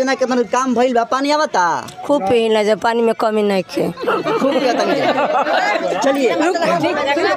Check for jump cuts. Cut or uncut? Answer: uncut